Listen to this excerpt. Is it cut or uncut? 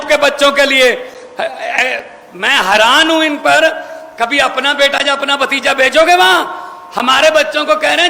uncut